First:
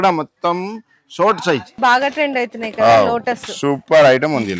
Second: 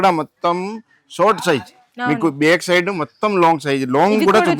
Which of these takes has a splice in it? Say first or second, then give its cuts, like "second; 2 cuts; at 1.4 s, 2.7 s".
first; 1 cut; at 1.8 s